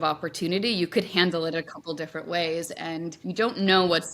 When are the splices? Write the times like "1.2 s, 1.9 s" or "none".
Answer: 3.2 s

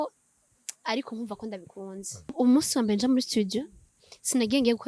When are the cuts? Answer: 2.3 s

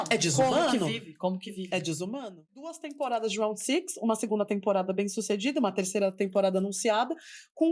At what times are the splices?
2.7 s

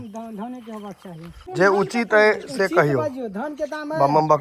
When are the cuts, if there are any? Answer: 1.4 s

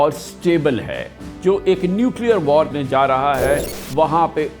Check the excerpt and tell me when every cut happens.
1.2 s, 2.7 s

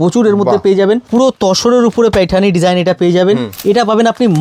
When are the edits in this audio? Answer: 1.0 s, 3.5 s

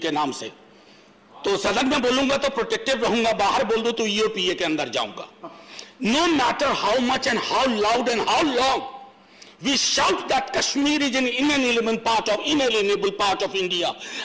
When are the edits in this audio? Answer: none

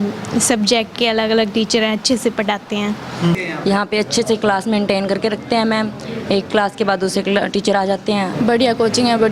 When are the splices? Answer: 3.4 s, 8.3 s

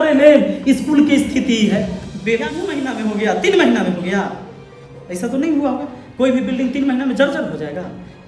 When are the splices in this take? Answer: 2.7 s

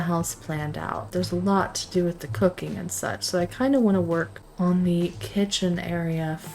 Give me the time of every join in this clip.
1.1 s, 4.4 s

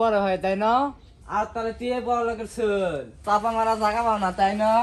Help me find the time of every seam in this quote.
none

